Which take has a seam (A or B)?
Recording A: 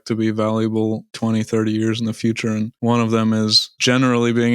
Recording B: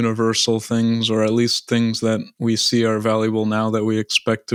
A